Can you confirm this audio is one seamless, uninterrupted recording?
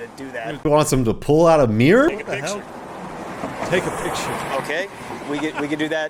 yes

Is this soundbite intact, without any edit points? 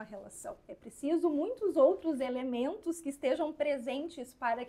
yes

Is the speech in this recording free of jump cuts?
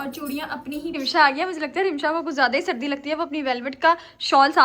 no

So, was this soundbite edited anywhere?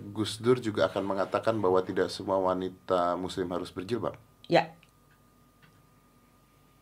no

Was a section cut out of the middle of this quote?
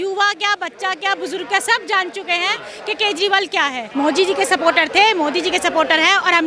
yes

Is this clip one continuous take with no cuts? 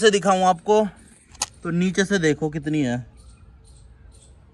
yes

